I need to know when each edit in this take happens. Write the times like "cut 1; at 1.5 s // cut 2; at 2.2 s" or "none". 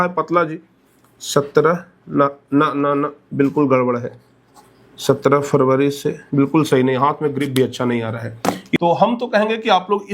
cut 1; at 8.8 s